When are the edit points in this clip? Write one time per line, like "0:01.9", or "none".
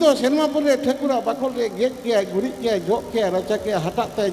none